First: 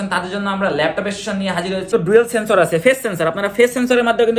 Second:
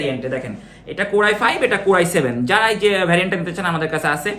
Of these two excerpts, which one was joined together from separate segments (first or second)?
first